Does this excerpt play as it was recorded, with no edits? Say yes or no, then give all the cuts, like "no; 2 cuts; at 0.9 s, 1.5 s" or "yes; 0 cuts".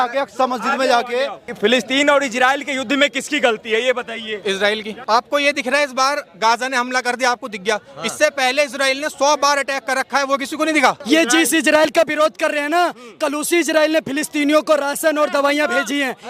no; 3 cuts; at 1.4 s, 4.9 s, 11.0 s